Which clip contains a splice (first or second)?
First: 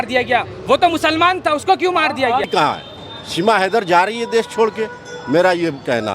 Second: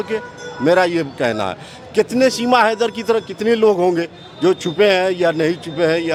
first